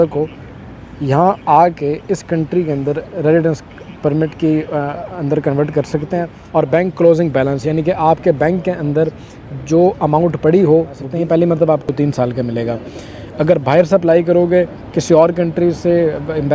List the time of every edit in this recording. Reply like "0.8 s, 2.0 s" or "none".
6.4 s, 11.0 s, 11.9 s